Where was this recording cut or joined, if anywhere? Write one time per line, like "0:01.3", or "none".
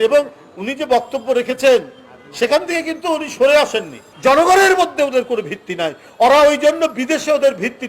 0:04.1